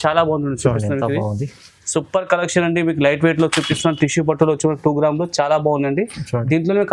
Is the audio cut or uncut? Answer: uncut